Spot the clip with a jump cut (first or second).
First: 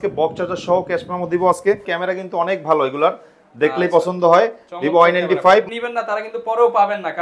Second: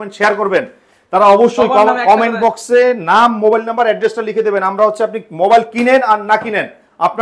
first